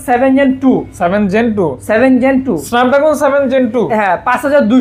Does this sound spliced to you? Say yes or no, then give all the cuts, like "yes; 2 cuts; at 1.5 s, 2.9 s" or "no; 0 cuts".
no; 0 cuts